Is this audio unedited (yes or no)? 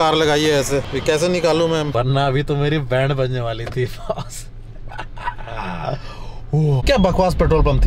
no